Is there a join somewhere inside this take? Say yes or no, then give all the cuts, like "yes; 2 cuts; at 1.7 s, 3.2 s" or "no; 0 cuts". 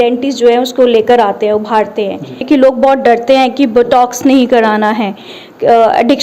yes; 1 cut; at 2.4 s